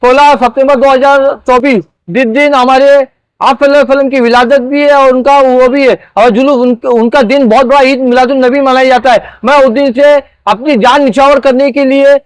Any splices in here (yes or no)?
no